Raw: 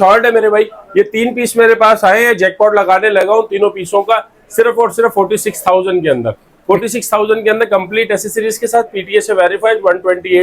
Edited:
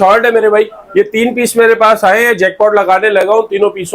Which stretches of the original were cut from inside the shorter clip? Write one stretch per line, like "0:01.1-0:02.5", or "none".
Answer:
none